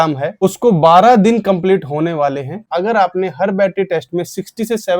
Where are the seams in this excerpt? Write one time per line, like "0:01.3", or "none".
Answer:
0:02.5